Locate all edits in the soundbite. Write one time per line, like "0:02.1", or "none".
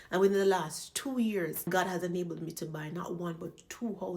0:01.7